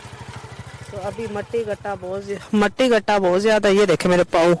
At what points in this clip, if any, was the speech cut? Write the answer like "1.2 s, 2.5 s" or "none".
none